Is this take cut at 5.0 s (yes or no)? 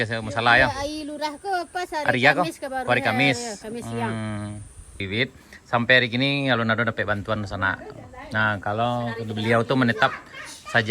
yes